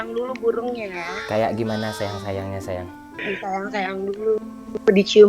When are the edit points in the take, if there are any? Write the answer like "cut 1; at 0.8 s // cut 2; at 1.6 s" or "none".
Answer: cut 1; at 3.0 s